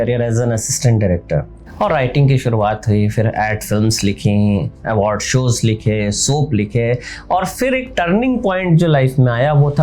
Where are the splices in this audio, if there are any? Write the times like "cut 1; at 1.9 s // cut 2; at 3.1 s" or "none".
cut 1; at 1.6 s